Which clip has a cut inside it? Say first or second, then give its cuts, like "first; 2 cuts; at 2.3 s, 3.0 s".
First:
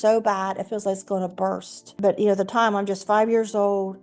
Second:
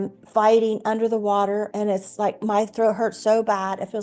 first; 1 cut; at 1.8 s